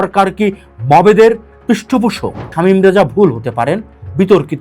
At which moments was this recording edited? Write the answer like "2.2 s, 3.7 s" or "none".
2.5 s